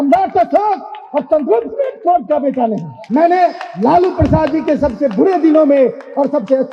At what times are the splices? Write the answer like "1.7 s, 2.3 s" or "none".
2.9 s